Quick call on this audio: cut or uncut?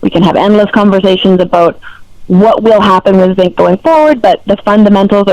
uncut